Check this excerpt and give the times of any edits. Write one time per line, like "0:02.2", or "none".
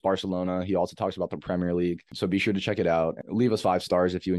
0:02.1
0:03.2

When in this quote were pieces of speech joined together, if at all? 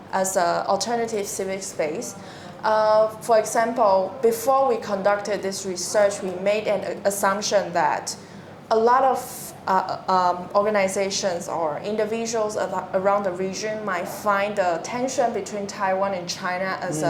none

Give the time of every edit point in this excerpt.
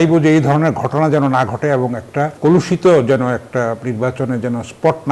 0:02.3

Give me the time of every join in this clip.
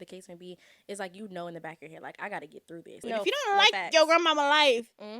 0:03.0

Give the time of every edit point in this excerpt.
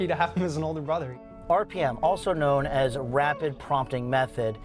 0:01.1

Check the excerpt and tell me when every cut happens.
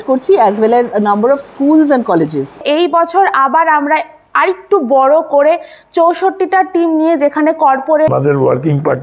0:02.6
0:08.1

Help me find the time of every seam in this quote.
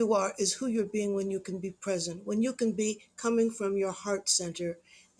none

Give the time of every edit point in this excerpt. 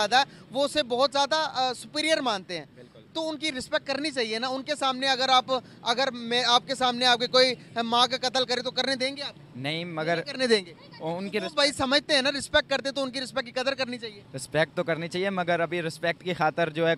none

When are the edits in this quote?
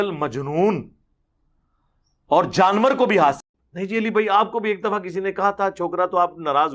0:03.4

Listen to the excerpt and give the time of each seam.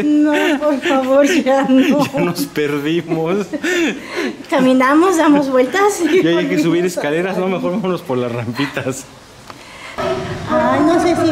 0:10.0

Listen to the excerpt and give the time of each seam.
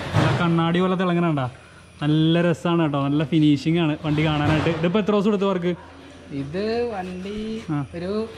none

